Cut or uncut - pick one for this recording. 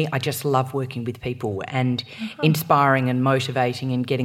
uncut